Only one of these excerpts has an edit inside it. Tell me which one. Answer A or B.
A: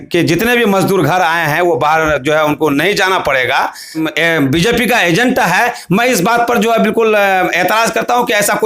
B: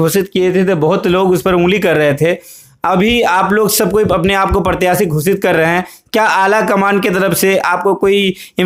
A